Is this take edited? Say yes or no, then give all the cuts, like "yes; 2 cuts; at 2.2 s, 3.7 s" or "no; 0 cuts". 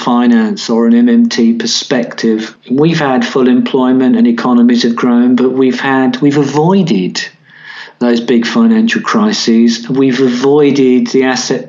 yes; 1 cut; at 2.5 s